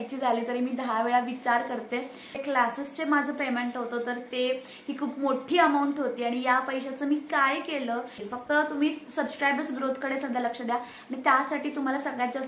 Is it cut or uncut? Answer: cut